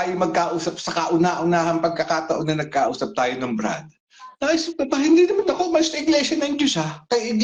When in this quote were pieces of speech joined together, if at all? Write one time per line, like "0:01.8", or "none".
none